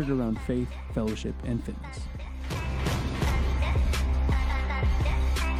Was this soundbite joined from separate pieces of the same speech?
no; 0 cuts

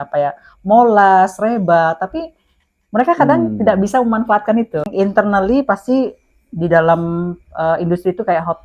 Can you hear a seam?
yes; 1 cut; at 4.9 s

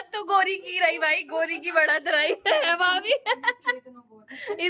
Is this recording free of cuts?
yes; 0 cuts

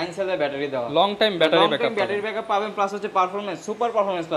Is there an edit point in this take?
no; 0 cuts

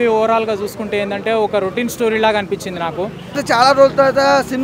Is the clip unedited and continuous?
no; 1 cut; at 3.4 s

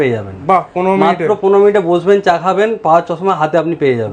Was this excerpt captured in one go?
yes; 0 cuts

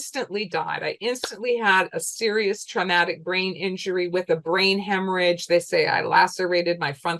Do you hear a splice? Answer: no; 0 cuts

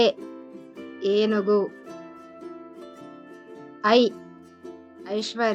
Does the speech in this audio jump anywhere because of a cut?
yes; 2 cuts; at 1.7 s, 3.2 s

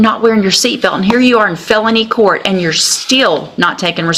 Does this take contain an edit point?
no; 0 cuts

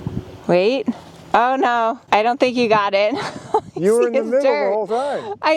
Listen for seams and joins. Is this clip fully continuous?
no; 1 cut; at 2.0 s

